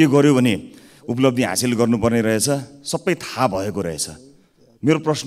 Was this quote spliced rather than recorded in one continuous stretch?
no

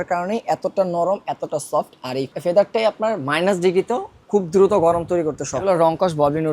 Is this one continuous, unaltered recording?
no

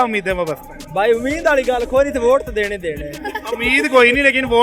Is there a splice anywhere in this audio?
no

